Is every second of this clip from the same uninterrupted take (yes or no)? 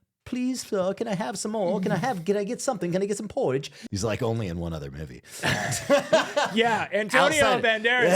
no